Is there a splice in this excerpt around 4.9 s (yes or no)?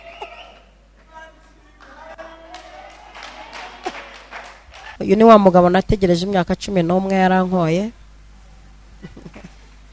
yes